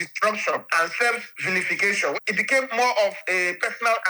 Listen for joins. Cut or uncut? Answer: cut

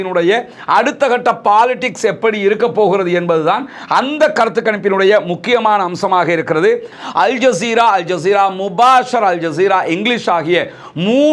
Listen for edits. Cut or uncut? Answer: cut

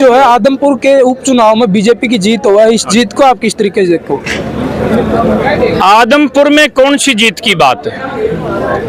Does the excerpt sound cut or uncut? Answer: uncut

